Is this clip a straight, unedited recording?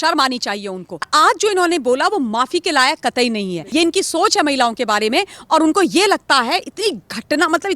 no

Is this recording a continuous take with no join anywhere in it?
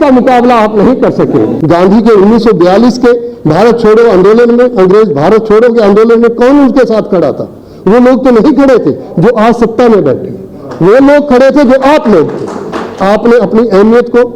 no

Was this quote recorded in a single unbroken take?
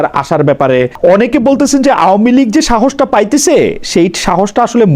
no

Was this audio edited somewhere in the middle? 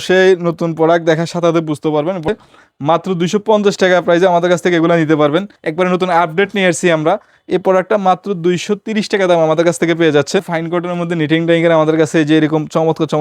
yes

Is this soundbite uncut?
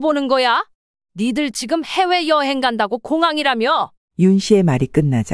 yes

